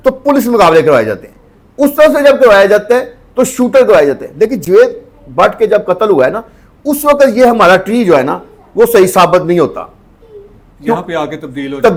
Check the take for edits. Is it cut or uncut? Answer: uncut